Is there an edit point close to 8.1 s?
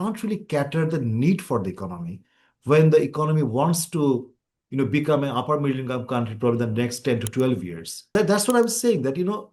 yes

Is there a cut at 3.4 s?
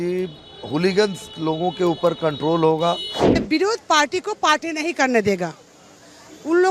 yes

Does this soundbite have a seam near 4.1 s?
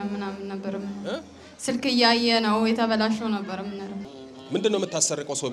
yes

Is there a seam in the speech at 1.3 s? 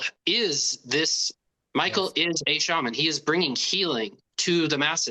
yes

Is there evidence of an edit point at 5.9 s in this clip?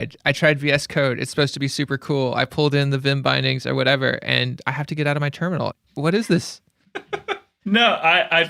yes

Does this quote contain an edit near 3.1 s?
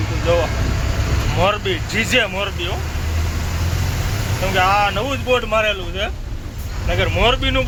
no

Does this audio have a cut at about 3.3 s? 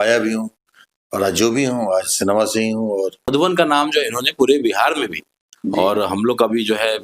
yes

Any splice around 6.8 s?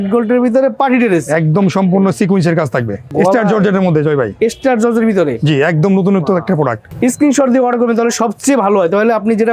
yes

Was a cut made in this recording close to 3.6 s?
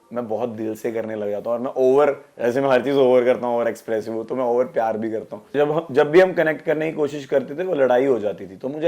no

